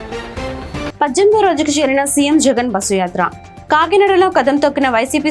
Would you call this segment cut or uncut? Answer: cut